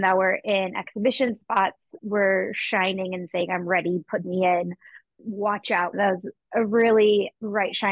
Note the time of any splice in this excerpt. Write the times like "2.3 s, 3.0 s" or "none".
1.9 s, 5.9 s